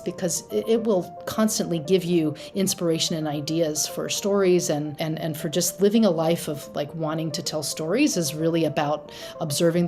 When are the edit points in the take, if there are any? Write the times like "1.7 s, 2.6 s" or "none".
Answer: 4.9 s